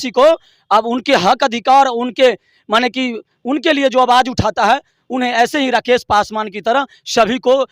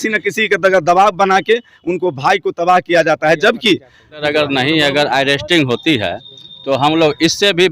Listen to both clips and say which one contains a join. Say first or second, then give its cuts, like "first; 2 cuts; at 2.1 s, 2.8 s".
second; 1 cut; at 4.2 s